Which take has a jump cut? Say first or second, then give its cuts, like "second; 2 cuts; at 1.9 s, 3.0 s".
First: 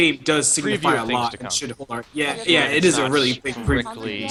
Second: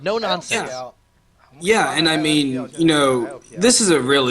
second; 1 cut; at 3.4 s